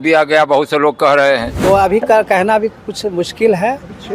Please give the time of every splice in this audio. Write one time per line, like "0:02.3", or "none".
0:01.5